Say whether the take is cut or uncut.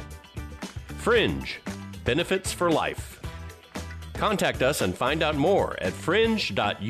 uncut